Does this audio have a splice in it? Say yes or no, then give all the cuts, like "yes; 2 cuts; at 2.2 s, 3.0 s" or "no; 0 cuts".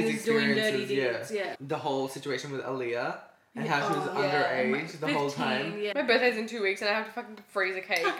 yes; 2 cuts; at 1.6 s, 5.9 s